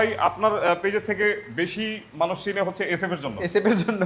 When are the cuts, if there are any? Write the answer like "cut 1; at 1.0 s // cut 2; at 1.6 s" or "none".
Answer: none